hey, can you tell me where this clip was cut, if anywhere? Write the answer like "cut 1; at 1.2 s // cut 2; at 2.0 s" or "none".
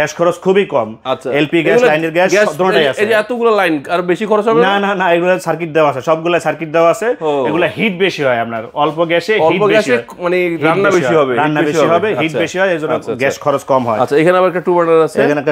none